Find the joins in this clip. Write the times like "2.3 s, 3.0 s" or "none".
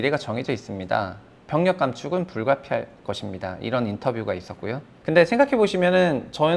4.9 s